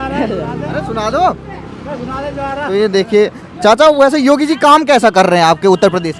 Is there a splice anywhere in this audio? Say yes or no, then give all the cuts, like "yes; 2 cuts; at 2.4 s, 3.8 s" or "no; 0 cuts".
no; 0 cuts